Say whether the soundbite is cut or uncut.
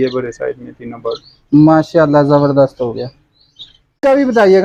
uncut